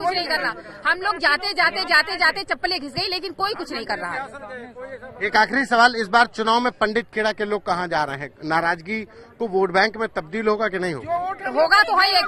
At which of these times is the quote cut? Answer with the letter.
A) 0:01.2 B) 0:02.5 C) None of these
C